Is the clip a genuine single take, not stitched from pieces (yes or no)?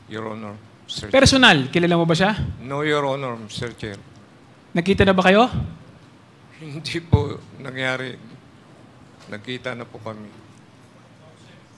yes